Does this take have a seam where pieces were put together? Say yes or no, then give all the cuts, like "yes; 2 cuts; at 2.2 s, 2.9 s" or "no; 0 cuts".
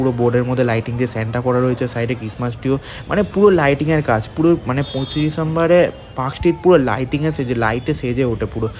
no; 0 cuts